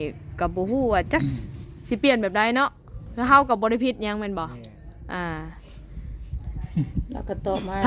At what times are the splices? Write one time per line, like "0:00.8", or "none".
none